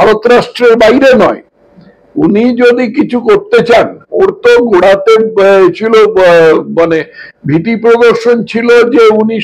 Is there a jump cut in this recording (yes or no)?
no